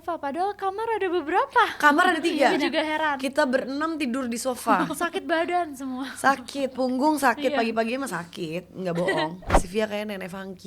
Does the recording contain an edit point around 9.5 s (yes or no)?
yes